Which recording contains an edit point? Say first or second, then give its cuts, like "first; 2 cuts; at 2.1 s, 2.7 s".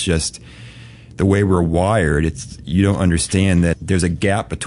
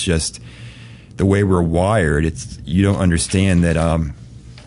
first; 1 cut; at 3.7 s